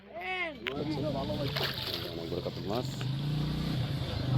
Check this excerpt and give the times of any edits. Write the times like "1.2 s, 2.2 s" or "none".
1.5 s